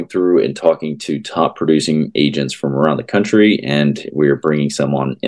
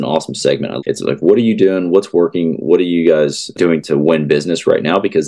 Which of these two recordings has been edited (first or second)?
second